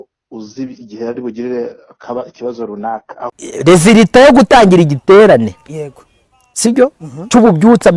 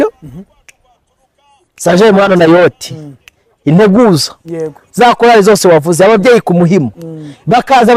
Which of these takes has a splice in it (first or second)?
first